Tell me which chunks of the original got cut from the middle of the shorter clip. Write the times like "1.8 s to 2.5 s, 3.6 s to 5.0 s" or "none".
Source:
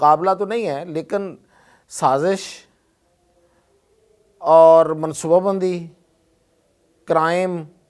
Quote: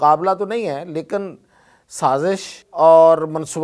2.6 s to 4.2 s